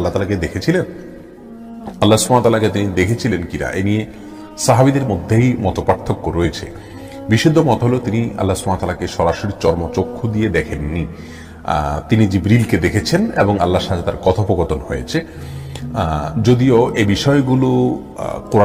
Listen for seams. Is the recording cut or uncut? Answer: uncut